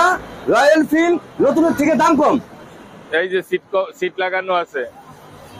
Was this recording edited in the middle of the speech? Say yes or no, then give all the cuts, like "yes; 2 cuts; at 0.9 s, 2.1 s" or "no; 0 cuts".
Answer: no; 0 cuts